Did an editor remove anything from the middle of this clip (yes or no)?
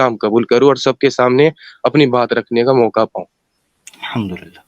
no